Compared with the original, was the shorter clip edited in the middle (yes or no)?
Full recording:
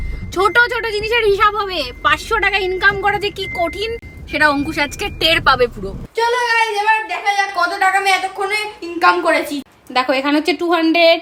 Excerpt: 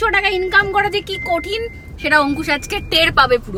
no